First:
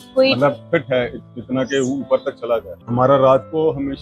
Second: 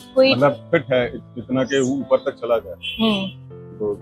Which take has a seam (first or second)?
first